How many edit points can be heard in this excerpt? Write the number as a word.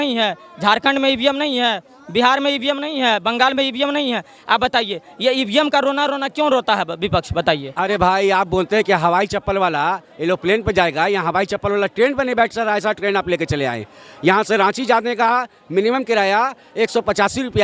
one